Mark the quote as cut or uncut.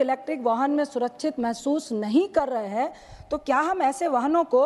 uncut